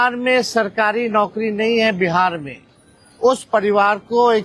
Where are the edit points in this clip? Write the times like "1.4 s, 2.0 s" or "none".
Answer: none